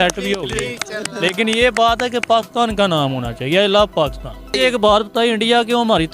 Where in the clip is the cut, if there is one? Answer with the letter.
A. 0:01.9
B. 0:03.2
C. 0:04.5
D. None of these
C